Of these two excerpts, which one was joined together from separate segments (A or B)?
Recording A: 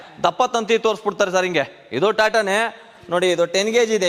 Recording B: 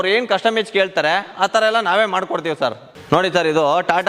B